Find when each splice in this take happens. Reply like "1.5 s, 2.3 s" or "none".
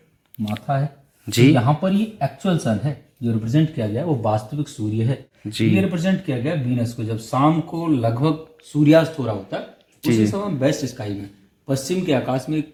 none